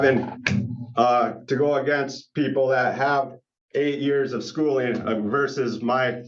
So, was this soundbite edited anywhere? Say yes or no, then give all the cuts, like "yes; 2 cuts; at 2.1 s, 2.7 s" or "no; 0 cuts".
no; 0 cuts